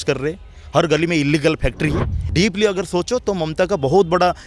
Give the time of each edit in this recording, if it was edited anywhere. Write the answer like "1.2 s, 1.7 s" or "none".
2.2 s